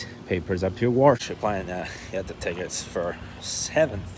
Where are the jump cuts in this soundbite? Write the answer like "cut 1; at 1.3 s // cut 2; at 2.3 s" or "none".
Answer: cut 1; at 1.2 s